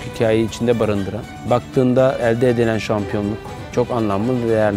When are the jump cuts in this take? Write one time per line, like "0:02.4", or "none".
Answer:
0:01.3

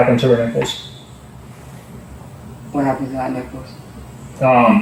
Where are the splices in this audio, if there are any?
none

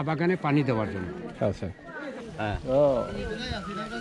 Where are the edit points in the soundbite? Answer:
0:02.2

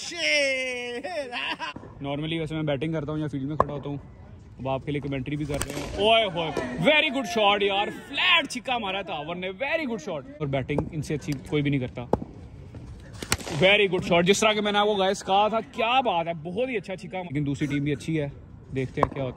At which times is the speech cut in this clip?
0:01.8
0:10.4
0:17.2

